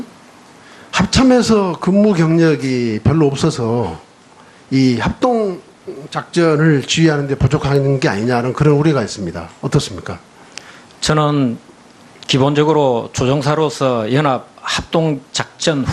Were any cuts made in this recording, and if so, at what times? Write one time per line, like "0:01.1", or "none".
0:10.4

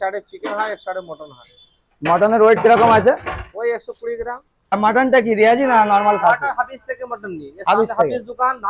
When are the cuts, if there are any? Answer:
0:04.7

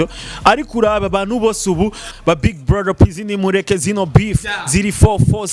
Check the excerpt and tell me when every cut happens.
0:02.1

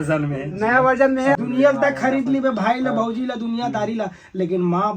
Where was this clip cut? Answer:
0:01.4

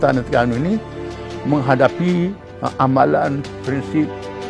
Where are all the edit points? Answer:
none

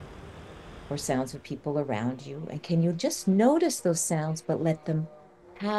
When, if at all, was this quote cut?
none

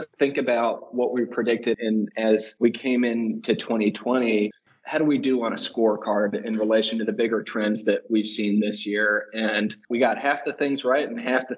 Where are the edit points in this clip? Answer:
none

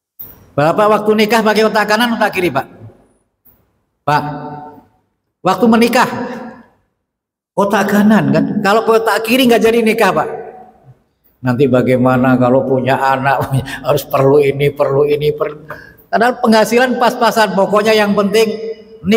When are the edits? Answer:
none

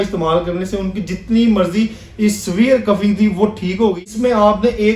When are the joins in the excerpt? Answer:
0:04.0

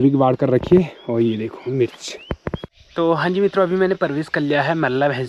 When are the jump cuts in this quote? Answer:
0:02.7

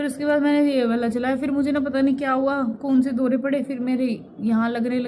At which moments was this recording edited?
none

